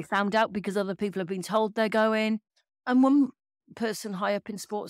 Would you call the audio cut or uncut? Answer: cut